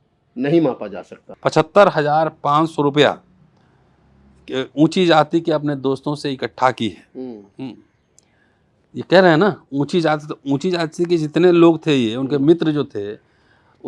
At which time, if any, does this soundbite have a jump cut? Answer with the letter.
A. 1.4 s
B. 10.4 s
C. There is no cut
A